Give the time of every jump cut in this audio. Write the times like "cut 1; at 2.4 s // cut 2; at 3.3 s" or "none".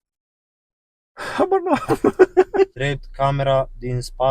cut 1; at 2.8 s